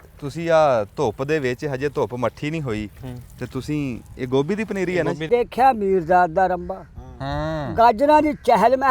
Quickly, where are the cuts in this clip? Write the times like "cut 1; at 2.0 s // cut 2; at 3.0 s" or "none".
cut 1; at 5.3 s